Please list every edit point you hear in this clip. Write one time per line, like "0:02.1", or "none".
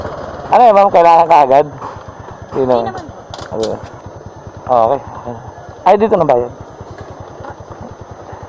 0:04.0